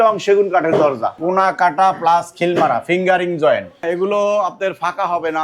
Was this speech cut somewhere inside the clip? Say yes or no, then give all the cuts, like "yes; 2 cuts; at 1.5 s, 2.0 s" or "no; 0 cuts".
yes; 2 cuts; at 1.1 s, 3.8 s